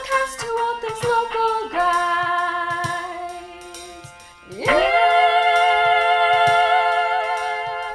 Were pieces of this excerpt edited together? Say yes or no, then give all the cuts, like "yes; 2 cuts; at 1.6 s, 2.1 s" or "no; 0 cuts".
no; 0 cuts